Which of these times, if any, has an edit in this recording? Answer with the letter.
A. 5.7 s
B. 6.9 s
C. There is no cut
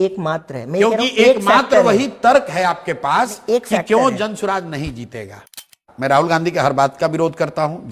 A